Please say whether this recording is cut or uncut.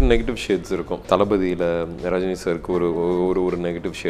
cut